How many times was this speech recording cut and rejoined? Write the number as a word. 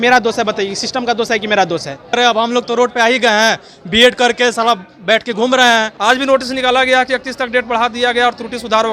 two